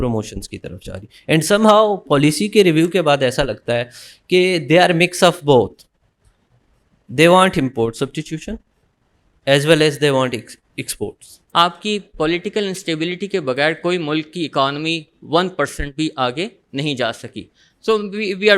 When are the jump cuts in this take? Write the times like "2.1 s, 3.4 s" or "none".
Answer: 11.3 s